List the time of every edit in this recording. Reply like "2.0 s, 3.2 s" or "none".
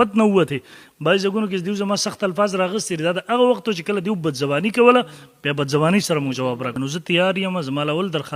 6.7 s